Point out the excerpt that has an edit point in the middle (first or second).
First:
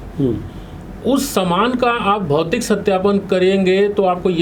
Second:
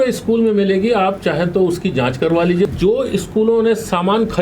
second